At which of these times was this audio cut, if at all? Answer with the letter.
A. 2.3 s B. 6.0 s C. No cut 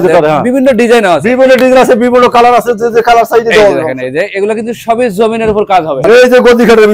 B